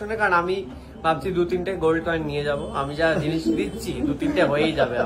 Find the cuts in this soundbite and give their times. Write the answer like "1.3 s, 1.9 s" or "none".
none